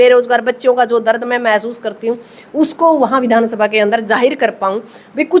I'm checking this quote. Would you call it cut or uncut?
uncut